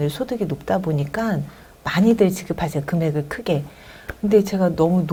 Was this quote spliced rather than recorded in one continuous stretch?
no; 0 cuts

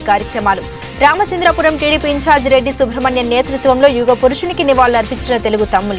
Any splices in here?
no; 0 cuts

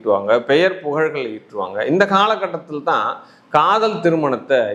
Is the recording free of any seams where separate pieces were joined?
yes; 0 cuts

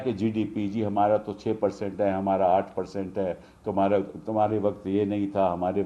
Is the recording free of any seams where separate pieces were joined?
yes; 0 cuts

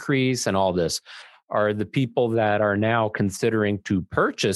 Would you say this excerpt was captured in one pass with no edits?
yes; 0 cuts

